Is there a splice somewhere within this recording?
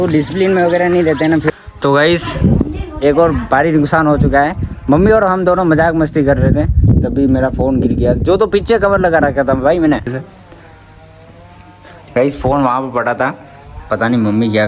yes; 2 cuts; at 1.5 s, 10.1 s

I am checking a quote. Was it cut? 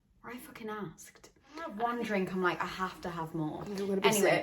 yes; 1 cut; at 1.7 s

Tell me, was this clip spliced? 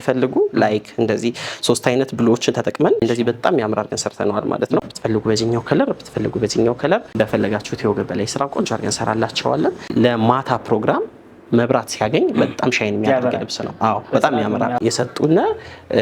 yes; 5 cuts; at 3.0 s, 4.8 s, 7.1 s, 9.9 s, 14.8 s

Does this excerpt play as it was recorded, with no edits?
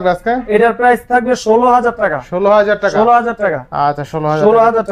yes; 0 cuts

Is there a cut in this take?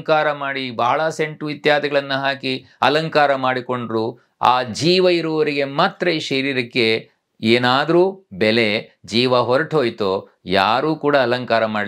no; 0 cuts

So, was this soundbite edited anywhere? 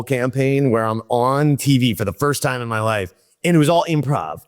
yes; 1 cut; at 3.2 s

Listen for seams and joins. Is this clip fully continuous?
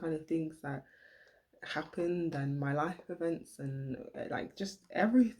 yes; 0 cuts

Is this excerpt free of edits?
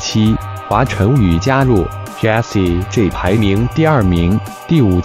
yes; 0 cuts

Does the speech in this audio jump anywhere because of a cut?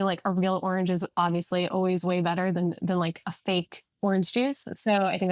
no; 0 cuts

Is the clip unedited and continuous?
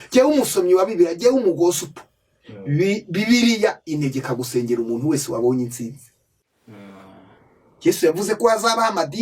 no; 1 cut; at 6.4 s

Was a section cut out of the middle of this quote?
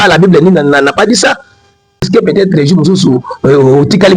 yes; 1 cut; at 2.1 s

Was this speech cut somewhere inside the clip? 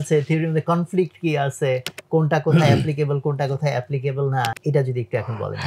yes; 1 cut; at 4.6 s

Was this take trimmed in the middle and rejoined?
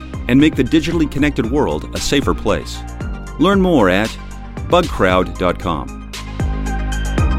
yes; 1 cut; at 6.1 s

